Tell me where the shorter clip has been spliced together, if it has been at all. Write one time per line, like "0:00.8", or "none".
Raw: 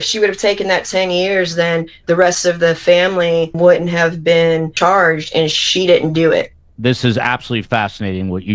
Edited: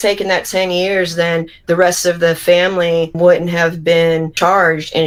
none